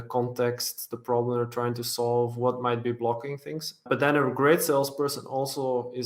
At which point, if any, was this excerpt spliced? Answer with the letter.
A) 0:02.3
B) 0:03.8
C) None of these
B